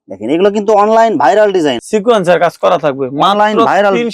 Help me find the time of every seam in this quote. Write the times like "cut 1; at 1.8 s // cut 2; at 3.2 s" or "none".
cut 1; at 1.8 s